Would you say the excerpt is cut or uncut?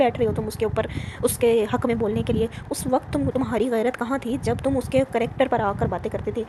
uncut